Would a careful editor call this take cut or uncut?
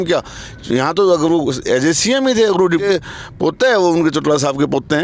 cut